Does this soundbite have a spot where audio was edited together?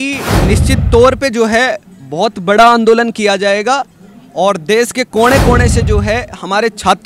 no; 0 cuts

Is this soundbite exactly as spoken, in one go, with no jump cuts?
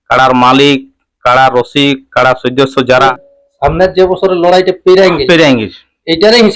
no; 1 cut; at 3.1 s

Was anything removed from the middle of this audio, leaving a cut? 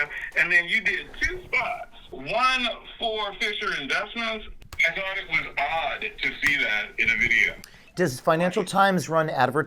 yes; 3 cuts; at 2.0 s, 4.6 s, 7.7 s

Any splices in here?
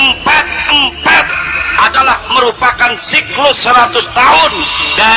yes; 1 cut; at 1.2 s

